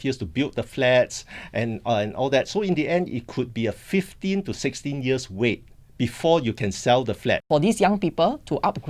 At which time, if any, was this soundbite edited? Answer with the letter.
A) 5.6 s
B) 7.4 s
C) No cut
B